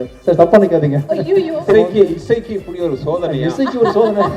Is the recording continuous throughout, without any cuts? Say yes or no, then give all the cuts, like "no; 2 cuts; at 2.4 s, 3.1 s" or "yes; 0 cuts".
no; 1 cut; at 1.7 s